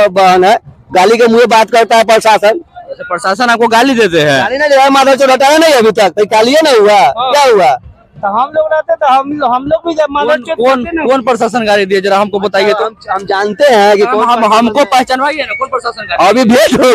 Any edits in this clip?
no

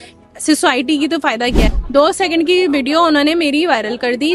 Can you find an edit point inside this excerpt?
yes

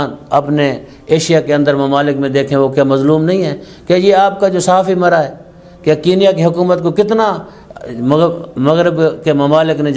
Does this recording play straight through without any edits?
yes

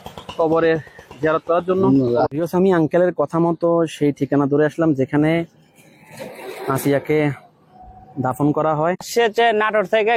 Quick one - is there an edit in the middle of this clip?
yes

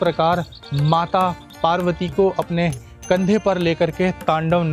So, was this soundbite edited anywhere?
no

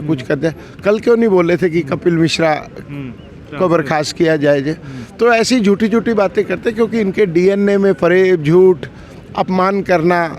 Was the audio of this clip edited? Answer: no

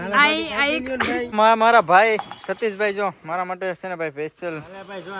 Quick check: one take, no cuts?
no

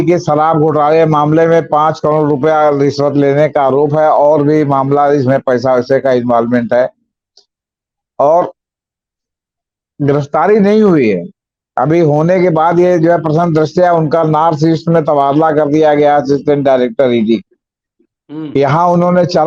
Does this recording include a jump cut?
no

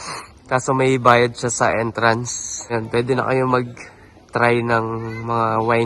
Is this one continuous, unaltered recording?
no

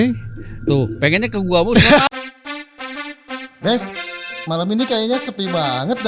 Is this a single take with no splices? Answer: no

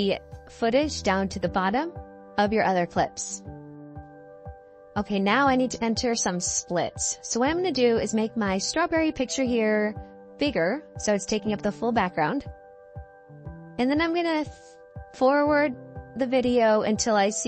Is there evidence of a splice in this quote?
no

